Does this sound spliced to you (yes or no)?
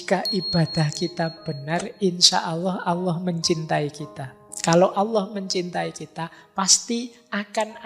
no